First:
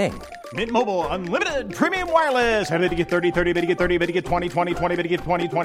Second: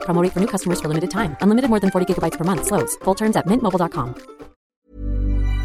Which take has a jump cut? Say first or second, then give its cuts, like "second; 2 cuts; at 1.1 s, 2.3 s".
second; 1 cut; at 4.6 s